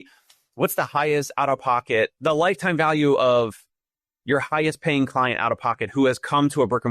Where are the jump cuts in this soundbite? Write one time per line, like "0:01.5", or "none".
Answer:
none